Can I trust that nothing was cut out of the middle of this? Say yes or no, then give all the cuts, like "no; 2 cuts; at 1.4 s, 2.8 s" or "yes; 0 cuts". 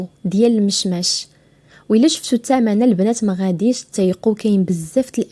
yes; 0 cuts